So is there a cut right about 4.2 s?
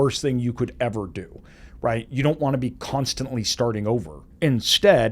yes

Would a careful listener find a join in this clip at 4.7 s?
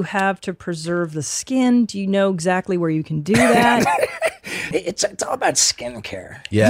yes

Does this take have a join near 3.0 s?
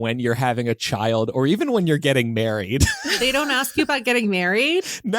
yes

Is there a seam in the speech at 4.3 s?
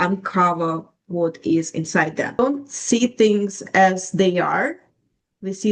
no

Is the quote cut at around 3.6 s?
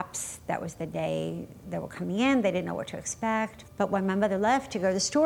yes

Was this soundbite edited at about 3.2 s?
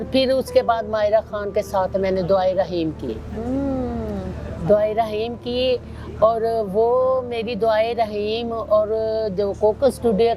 no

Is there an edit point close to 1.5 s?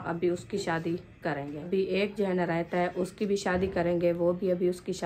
yes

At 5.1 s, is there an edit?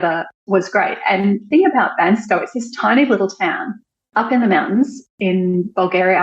yes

